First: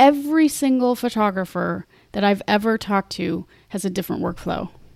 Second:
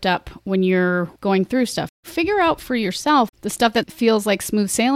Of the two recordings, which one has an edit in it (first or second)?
second